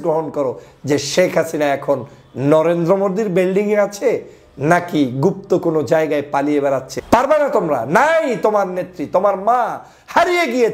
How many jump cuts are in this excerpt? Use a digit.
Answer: 1